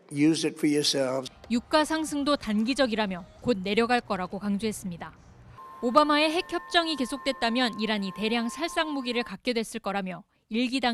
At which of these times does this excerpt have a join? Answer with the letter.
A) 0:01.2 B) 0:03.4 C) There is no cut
A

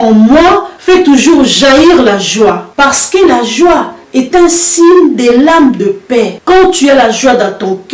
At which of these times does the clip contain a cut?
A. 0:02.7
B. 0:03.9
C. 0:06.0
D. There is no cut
A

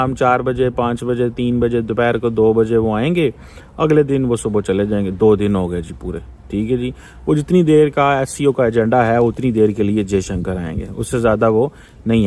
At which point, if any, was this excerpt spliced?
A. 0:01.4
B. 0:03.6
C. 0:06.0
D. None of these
D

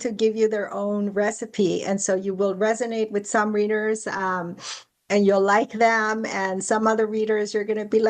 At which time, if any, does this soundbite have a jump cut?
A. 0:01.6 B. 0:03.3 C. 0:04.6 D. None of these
D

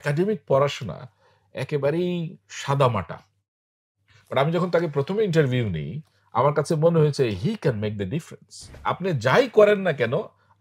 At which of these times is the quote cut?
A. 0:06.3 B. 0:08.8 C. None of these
B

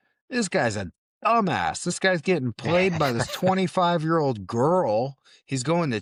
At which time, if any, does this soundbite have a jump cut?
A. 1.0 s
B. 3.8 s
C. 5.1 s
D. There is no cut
D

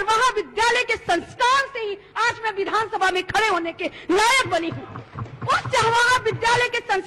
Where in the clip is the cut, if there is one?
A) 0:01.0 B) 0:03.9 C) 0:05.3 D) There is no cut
D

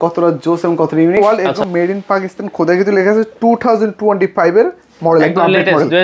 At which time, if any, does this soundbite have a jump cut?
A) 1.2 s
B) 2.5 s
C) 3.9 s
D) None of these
A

